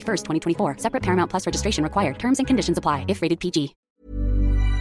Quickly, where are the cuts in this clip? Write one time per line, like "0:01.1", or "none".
0:03.9